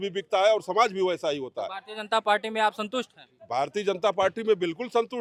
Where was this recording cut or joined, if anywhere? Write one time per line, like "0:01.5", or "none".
none